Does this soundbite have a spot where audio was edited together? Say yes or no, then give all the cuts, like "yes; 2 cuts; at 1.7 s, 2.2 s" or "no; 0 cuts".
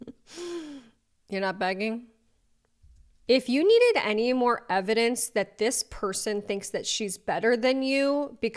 yes; 1 cut; at 3.1 s